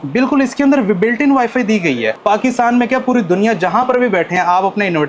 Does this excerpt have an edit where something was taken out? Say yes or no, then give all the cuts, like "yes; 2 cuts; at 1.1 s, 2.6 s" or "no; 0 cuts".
yes; 1 cut; at 2.2 s